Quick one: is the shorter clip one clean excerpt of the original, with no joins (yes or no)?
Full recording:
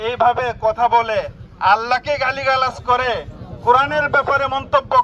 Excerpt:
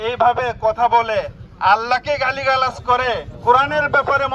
no